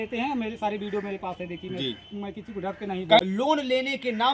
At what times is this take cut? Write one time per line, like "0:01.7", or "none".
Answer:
0:03.2